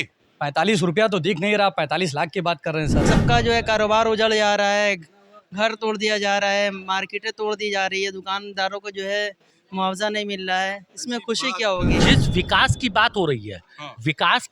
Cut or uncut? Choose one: cut